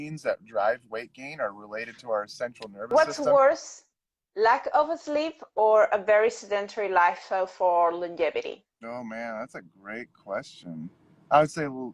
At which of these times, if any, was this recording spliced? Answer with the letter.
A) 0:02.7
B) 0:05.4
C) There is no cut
A